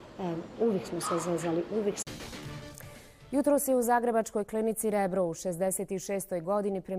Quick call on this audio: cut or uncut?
uncut